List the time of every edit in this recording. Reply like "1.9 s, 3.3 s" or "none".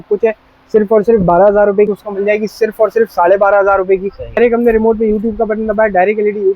1.9 s, 4.4 s